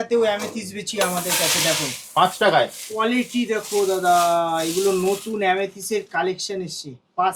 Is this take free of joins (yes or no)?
yes